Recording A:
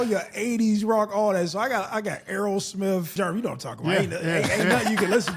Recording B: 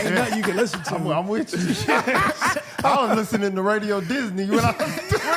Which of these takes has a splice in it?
A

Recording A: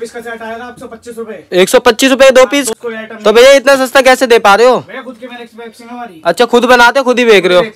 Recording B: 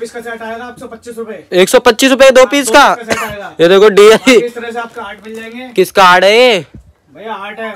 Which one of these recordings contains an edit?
A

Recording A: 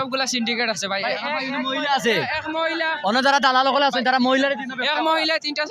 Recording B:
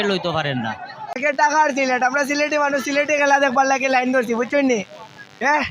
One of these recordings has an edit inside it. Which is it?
B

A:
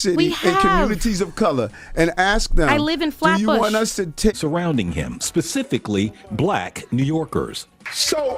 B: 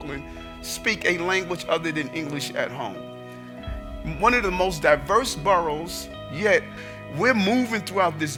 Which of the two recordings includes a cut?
A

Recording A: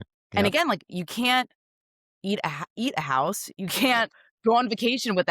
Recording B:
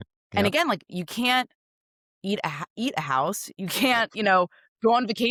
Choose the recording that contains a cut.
A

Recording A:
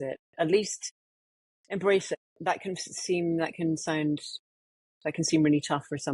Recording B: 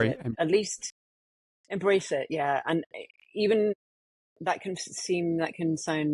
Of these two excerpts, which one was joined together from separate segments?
A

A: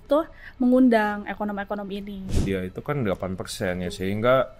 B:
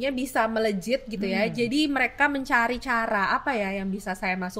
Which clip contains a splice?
A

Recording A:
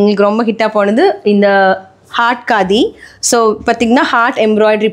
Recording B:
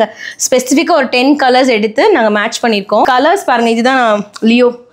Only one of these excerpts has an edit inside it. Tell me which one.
B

